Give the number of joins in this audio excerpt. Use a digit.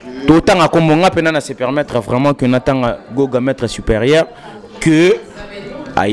0